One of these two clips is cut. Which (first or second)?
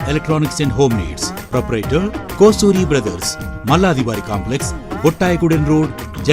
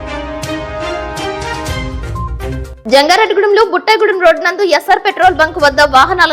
second